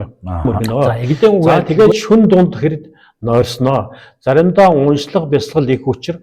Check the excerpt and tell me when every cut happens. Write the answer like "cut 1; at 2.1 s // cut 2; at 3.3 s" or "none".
cut 1; at 1.6 s